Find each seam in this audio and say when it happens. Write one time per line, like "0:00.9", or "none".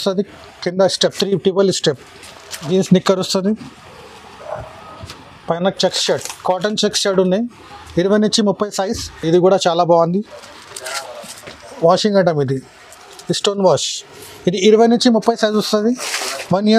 0:02.6
0:09.2